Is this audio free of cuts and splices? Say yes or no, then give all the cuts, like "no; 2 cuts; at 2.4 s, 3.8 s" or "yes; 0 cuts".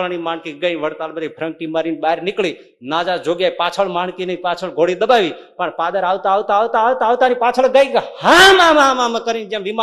yes; 0 cuts